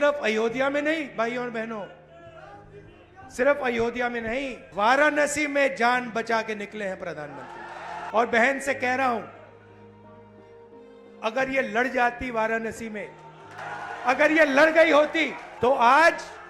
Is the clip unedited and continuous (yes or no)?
no